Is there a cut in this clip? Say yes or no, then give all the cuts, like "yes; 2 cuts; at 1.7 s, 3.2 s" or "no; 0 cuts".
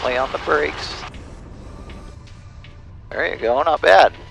yes; 1 cut; at 2.2 s